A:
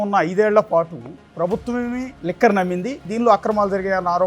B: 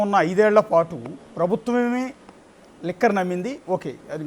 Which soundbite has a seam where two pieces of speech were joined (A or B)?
A